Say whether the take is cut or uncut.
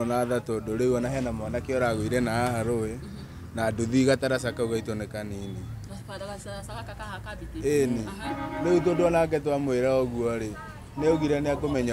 uncut